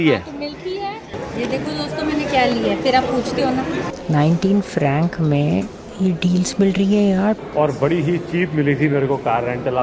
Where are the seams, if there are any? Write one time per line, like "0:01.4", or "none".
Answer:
0:01.2
0:04.0
0:07.4